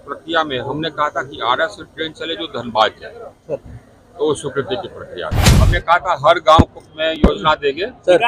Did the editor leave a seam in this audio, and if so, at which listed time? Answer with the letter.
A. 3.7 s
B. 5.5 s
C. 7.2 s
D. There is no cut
B